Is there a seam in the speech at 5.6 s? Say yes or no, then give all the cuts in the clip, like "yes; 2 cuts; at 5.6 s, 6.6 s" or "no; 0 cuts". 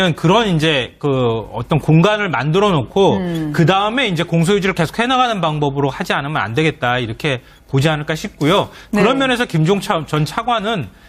no; 0 cuts